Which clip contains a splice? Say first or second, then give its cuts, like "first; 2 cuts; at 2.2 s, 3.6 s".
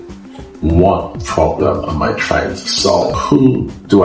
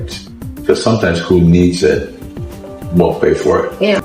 first; 1 cut; at 3.1 s